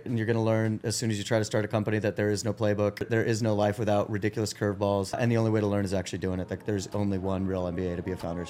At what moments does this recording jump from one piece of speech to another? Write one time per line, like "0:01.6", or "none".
0:03.1
0:05.2